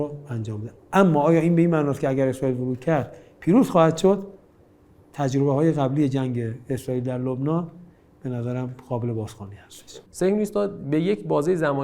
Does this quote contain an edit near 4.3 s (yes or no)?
no